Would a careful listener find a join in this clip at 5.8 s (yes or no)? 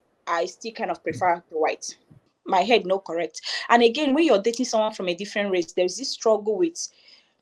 no